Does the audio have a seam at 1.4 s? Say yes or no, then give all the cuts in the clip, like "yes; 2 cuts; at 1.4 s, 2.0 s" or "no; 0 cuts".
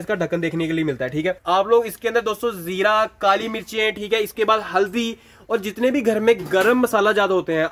yes; 1 cut; at 1.4 s